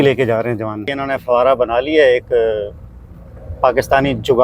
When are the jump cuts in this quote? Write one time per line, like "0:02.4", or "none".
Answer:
0:01.0

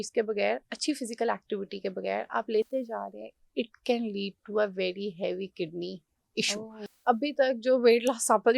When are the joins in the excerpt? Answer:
0:06.9

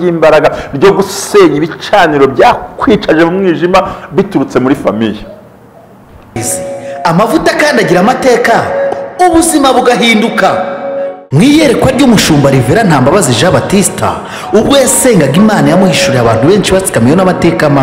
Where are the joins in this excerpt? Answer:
0:06.4

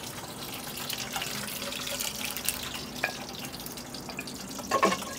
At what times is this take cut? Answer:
none

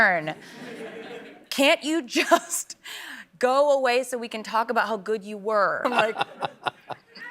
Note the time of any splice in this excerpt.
0:05.8

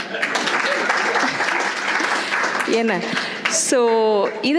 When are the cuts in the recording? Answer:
none

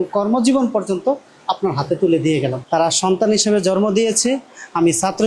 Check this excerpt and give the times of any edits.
0:02.6

